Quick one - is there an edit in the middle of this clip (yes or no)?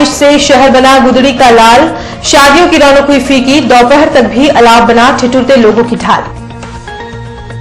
no